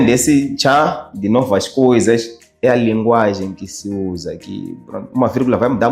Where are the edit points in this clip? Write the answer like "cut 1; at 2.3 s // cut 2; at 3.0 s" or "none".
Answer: none